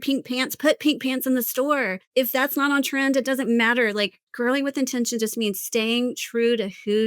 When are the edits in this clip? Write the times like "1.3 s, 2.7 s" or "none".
2.0 s, 4.2 s